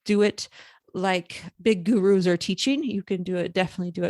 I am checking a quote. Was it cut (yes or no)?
yes